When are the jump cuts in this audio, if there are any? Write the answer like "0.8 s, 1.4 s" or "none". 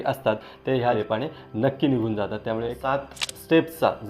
1.0 s, 2.8 s